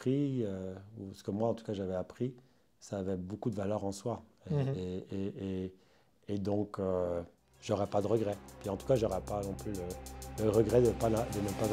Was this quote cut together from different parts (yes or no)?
no